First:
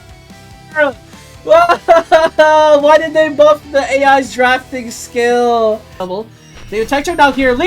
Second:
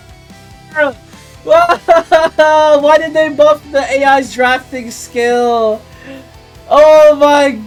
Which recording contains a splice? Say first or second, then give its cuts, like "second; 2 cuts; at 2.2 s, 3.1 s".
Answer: first; 1 cut; at 6.0 s